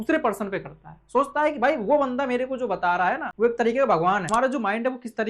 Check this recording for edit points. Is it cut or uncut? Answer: cut